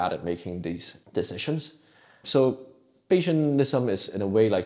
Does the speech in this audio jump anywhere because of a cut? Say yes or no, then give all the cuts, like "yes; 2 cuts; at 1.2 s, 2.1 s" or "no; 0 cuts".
no; 0 cuts